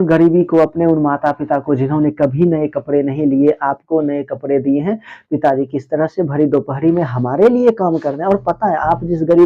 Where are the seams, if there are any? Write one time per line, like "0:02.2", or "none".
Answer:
none